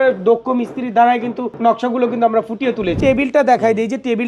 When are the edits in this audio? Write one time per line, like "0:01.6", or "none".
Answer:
0:01.5
0:03.0